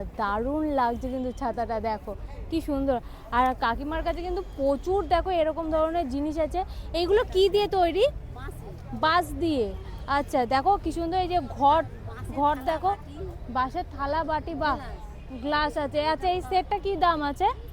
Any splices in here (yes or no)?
no